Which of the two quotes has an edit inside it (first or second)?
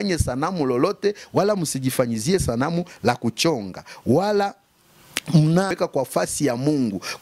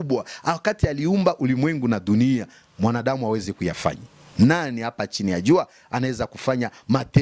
first